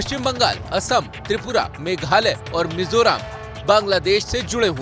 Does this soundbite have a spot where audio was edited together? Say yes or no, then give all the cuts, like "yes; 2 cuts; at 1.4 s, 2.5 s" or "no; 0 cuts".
no; 0 cuts